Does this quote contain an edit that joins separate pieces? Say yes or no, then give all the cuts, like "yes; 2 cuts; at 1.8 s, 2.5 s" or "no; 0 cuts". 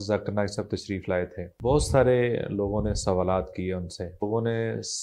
yes; 2 cuts; at 1.4 s, 4.2 s